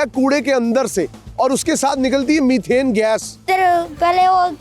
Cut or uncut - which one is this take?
cut